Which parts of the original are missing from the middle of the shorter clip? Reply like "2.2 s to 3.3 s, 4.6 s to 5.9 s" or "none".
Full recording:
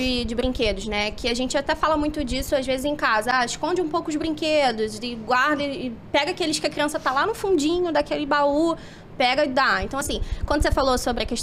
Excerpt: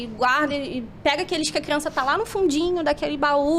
none